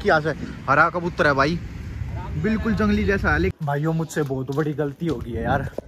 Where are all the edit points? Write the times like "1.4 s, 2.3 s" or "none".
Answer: 3.5 s